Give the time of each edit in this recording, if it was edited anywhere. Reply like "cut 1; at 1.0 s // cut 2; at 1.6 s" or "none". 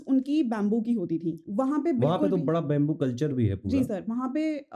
cut 1; at 1.4 s